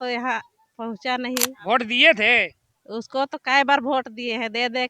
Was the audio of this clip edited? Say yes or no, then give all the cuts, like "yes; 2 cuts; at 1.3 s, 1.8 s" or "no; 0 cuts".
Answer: yes; 1 cut; at 1.6 s